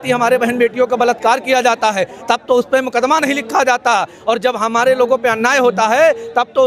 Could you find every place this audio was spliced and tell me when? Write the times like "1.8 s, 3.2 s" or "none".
none